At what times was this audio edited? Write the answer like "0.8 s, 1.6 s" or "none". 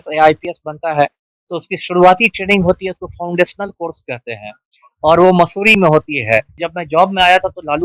6.6 s